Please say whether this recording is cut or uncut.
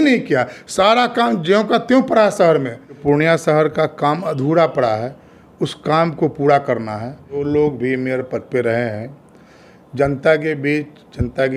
cut